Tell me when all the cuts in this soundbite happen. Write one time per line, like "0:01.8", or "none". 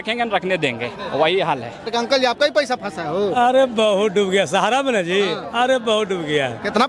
0:01.9